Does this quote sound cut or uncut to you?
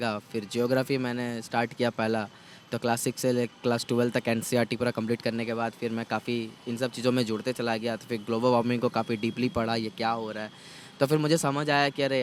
uncut